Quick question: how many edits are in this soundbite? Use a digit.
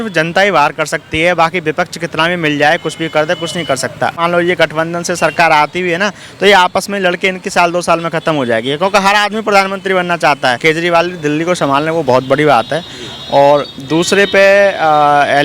2